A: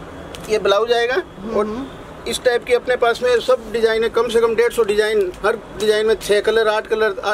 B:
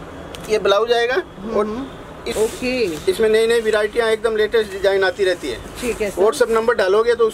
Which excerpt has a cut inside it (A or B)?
B